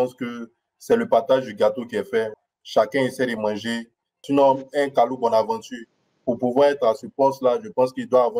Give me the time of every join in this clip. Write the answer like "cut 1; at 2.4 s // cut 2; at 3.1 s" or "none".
cut 1; at 2.3 s // cut 2; at 4.2 s